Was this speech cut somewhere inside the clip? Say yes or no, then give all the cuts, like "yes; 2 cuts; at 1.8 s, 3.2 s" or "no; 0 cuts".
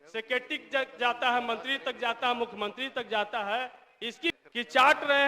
yes; 1 cut; at 4.3 s